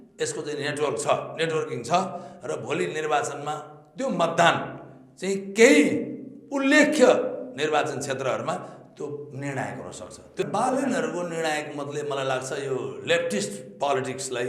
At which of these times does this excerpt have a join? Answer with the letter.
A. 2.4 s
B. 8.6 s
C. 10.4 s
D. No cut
C